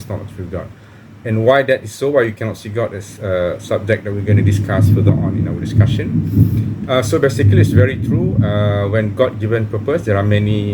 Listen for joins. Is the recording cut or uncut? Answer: uncut